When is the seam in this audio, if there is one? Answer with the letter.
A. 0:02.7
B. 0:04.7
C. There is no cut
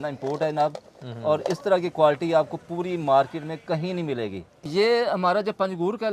B